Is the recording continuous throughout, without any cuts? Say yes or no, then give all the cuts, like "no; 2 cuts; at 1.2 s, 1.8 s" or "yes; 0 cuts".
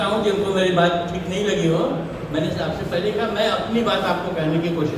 yes; 0 cuts